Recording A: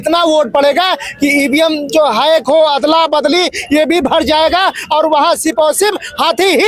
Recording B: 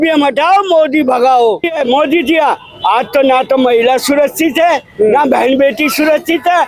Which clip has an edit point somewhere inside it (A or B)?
B